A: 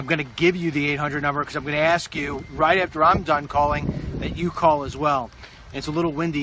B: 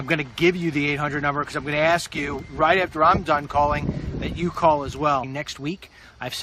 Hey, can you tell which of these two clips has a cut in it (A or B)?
A